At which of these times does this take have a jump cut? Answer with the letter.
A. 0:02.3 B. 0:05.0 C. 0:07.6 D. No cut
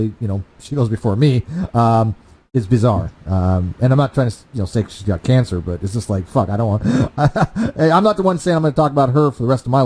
B